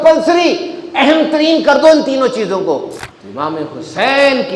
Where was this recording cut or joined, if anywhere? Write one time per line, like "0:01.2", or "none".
0:03.3

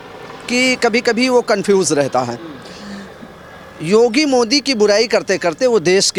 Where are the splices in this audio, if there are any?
none

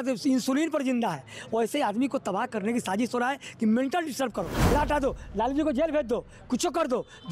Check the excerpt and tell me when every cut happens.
0:04.7

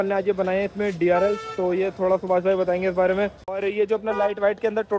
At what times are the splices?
0:03.4

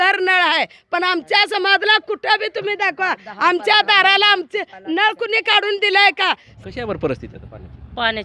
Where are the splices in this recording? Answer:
0:06.5

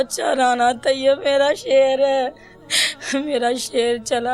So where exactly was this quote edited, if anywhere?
none

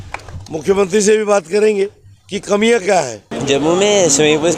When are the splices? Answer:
0:03.3

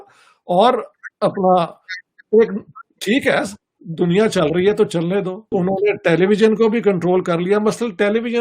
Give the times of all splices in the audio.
0:05.5

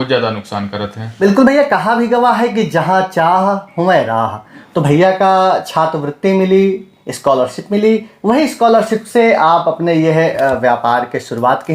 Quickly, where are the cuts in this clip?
0:01.2

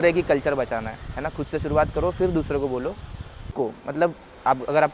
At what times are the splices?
0:03.5

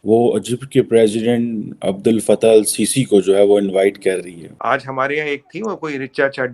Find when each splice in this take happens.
0:04.3

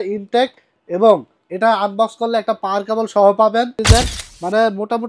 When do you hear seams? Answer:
0:03.8

